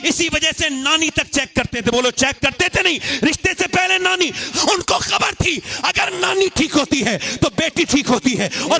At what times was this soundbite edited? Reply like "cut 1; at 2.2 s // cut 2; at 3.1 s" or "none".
cut 1; at 4.4 s